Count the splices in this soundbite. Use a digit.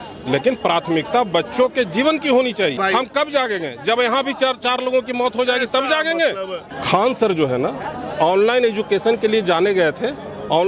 2